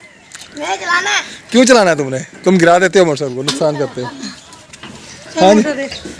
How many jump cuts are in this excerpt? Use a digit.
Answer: 0